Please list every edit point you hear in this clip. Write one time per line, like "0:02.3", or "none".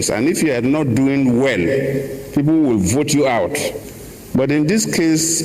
0:03.8